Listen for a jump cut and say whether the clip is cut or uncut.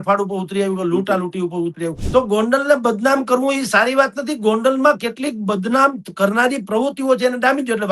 cut